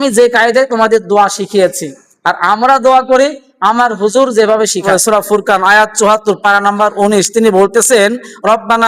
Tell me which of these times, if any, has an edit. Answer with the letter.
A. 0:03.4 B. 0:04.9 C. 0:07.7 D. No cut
B